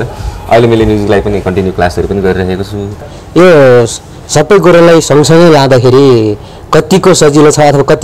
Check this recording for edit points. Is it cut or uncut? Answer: cut